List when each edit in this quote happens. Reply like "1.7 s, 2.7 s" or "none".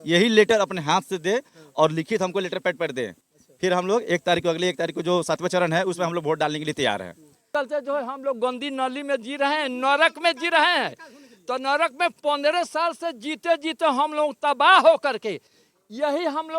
7.5 s